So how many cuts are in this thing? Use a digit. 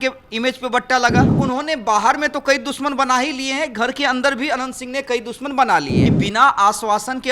2